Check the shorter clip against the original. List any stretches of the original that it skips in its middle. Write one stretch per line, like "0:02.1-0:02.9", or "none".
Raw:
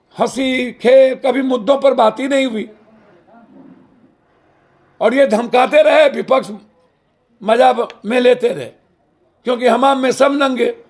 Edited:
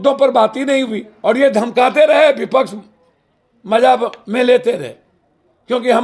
0:02.7-0:04.8